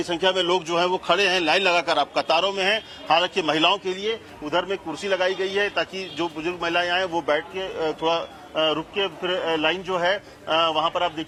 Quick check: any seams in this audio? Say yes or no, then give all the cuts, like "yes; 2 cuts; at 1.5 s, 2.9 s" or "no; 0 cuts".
no; 0 cuts